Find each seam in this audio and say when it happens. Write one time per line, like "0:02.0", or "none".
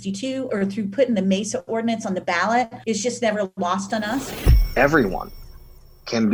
0:04.3